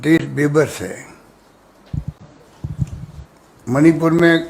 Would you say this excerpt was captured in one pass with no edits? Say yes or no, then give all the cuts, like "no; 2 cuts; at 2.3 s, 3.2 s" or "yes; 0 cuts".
yes; 0 cuts